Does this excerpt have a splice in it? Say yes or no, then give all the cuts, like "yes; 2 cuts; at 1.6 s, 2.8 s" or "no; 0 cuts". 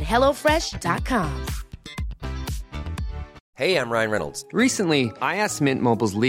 yes; 1 cut; at 3.4 s